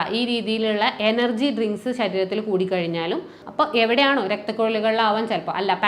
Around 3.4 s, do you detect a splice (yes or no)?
yes